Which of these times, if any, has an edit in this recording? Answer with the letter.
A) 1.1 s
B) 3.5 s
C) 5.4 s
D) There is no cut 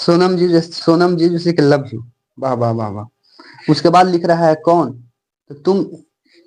D